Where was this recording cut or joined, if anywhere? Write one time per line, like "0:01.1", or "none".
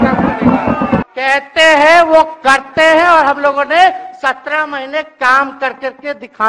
0:01.1